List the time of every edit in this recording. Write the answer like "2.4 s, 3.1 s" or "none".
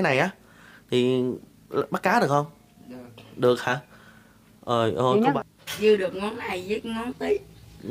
5.4 s